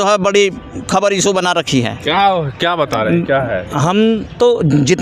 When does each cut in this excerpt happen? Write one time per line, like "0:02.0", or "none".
none